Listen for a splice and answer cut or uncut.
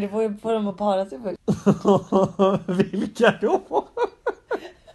cut